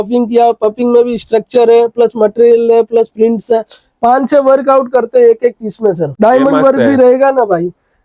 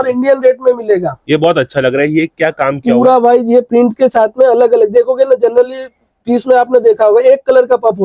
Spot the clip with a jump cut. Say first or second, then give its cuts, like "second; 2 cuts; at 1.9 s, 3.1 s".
first; 1 cut; at 6.1 s